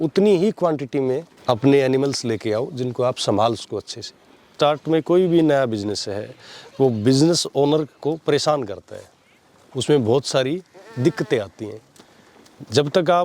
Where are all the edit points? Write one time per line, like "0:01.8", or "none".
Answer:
0:01.3
0:04.5